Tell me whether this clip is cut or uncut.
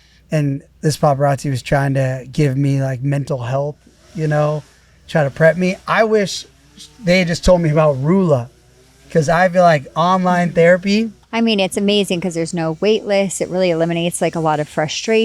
cut